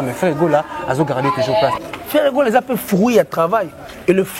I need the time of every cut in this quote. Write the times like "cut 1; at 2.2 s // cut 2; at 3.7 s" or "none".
cut 1; at 1.8 s